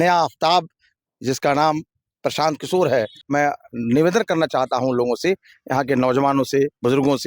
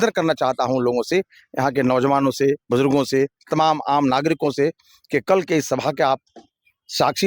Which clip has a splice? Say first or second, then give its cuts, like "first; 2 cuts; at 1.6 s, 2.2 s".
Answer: first; 1 cut; at 3.2 s